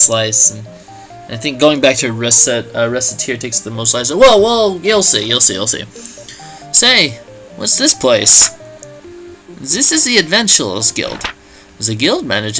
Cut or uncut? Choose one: uncut